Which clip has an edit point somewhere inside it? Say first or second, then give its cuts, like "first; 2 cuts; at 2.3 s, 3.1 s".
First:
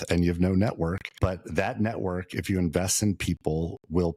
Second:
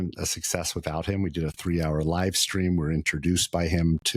first; 1 cut; at 1.1 s